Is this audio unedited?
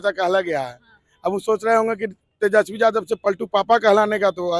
yes; 0 cuts

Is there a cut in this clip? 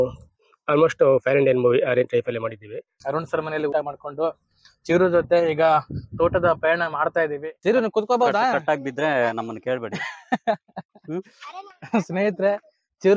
yes; 2 cuts; at 3.0 s, 7.5 s

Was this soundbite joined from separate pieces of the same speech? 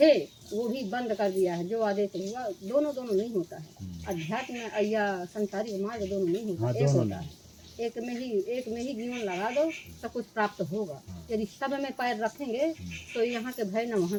no; 0 cuts

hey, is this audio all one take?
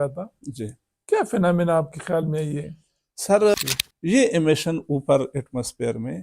no; 1 cut; at 3.5 s

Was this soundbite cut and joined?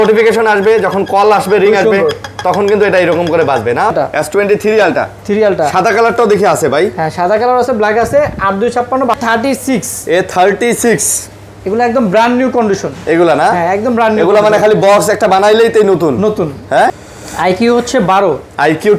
yes; 3 cuts; at 3.9 s, 9.1 s, 17.1 s

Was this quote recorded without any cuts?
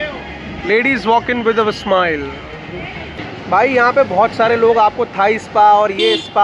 no; 1 cut; at 3.1 s

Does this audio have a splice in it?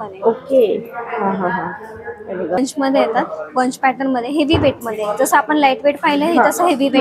yes; 1 cut; at 2.6 s

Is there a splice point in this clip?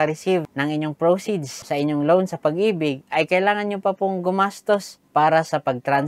no; 0 cuts

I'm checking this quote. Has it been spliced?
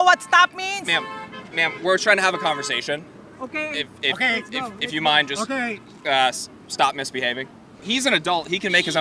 no; 0 cuts

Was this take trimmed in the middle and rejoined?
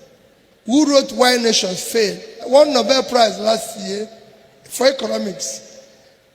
yes; 1 cut; at 2.5 s

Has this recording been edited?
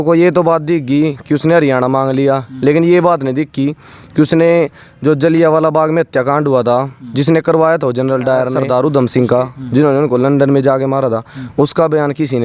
yes; 1 cut; at 8.6 s

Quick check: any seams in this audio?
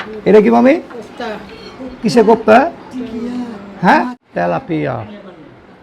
yes; 1 cut; at 4.2 s

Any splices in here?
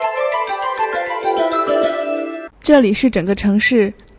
yes; 1 cut; at 2.5 s

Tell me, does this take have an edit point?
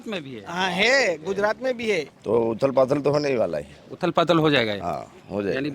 yes; 1 cut; at 2.1 s

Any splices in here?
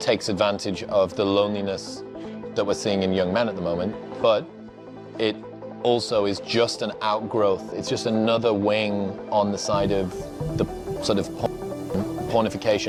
no; 0 cuts

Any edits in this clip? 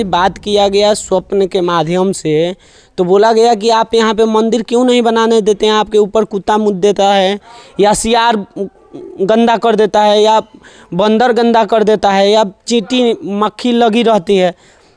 no; 0 cuts

